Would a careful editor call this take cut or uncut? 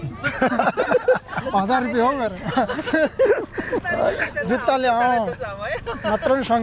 uncut